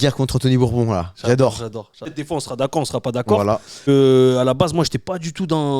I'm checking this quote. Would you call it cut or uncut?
cut